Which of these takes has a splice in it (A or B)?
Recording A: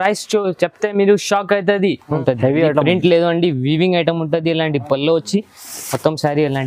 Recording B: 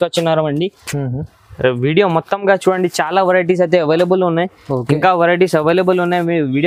A